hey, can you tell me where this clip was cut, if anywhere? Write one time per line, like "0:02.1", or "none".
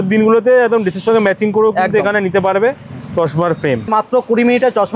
0:03.9